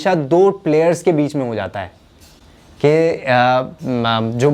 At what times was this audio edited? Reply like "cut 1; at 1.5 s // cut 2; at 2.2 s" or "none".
none